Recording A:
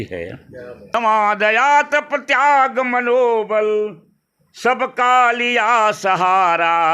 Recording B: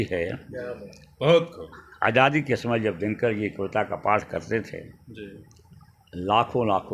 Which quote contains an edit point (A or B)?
A